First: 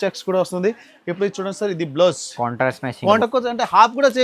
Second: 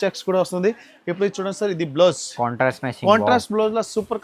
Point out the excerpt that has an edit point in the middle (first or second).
first